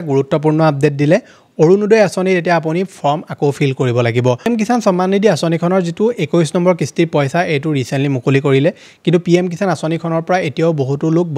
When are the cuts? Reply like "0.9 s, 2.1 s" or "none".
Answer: 4.4 s